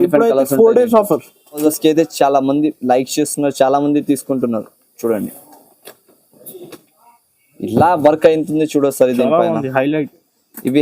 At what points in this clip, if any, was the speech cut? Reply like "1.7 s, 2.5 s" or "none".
1.6 s